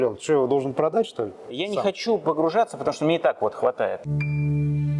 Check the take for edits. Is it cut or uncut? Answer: cut